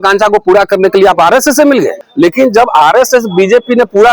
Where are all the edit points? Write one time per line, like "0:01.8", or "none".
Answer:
0:02.0